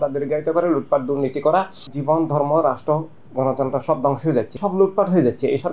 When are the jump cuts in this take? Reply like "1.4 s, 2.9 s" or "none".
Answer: 1.8 s, 4.5 s